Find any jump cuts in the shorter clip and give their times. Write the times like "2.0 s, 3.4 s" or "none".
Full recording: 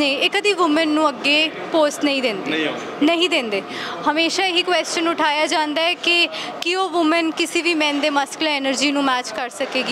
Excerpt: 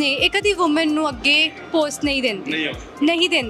none